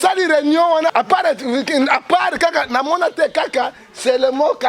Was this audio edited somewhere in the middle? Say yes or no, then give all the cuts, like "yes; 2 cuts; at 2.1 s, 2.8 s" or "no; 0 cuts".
yes; 1 cut; at 0.9 s